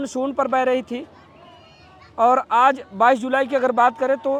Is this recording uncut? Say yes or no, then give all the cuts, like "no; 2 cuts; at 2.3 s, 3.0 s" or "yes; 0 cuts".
yes; 0 cuts